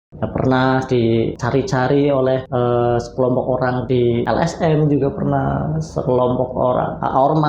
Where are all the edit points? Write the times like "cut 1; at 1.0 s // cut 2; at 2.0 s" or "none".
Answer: cut 1; at 1.4 s // cut 2; at 2.5 s // cut 3; at 4.1 s

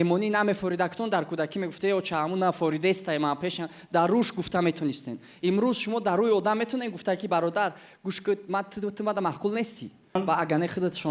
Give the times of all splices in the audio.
cut 1; at 10.2 s

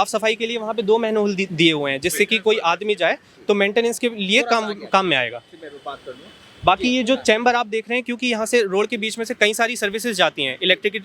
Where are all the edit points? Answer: none

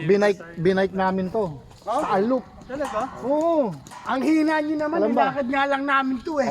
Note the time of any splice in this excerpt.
cut 1; at 4.0 s

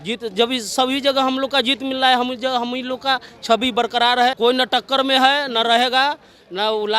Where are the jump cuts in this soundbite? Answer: cut 1; at 4.4 s

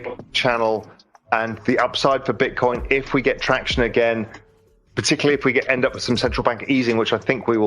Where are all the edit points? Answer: cut 1; at 2.8 s

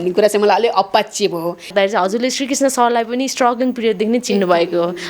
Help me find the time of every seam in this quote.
cut 1; at 1.7 s

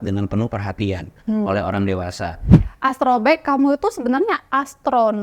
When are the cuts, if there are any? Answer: cut 1; at 2.6 s

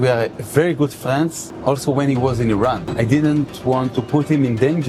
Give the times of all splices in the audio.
cut 1; at 1.5 s // cut 2; at 2.9 s // cut 3; at 4.0 s

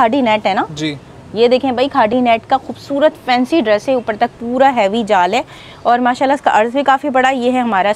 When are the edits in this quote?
none

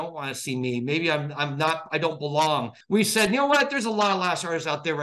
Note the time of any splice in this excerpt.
cut 1; at 2.7 s

